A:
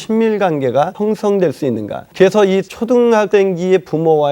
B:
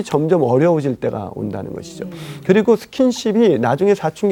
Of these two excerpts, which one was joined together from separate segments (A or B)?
A